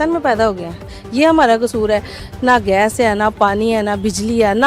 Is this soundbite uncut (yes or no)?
no